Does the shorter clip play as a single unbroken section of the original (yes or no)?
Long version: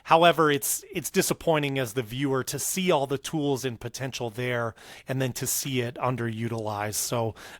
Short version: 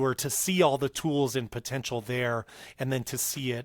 yes